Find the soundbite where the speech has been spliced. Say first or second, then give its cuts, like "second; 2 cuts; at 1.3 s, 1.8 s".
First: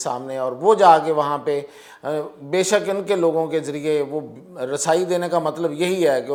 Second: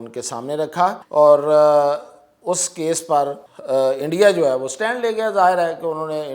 second; 2 cuts; at 1.0 s, 3.5 s